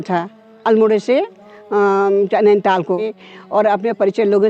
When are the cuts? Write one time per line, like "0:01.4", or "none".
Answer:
0:03.2